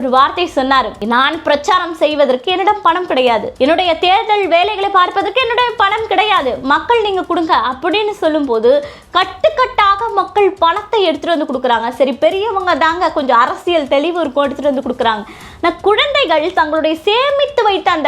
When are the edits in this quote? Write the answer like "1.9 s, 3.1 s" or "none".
1.0 s, 3.5 s

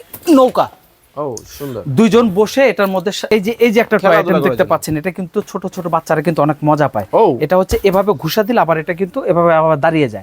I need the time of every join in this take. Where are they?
3.2 s

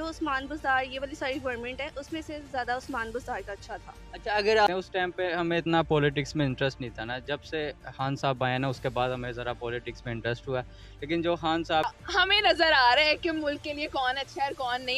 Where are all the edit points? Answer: 4.7 s, 11.9 s

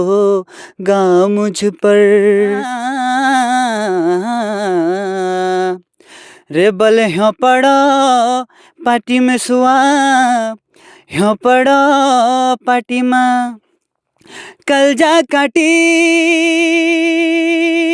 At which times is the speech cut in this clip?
2.8 s

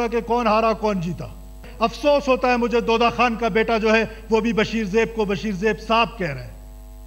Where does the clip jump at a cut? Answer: 1.6 s

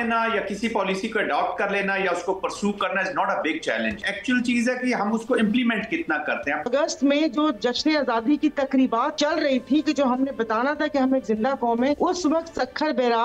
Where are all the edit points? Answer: 4.1 s, 6.7 s, 9.1 s, 12.0 s

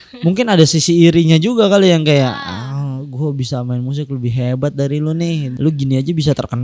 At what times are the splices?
5.5 s

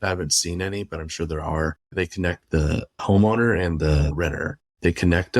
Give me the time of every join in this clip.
1.9 s, 3.0 s, 4.1 s

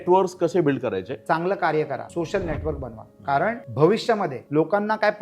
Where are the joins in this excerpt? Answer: 1.1 s, 2.1 s, 3.6 s, 4.4 s

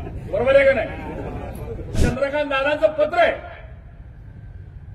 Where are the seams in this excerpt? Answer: 2.0 s

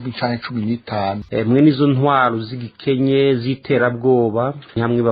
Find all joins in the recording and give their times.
1.2 s

